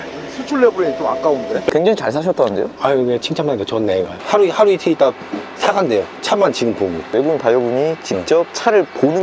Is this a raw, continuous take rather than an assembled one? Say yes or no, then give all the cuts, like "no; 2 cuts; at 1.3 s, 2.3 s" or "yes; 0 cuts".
no; 3 cuts; at 1.7 s, 4.2 s, 7.1 s